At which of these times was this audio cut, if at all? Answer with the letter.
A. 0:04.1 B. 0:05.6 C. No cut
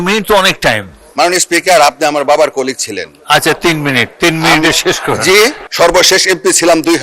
B